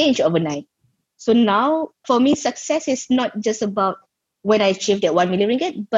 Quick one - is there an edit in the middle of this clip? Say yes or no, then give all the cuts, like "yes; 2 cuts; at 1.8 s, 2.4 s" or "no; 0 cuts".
yes; 1 cut; at 2.0 s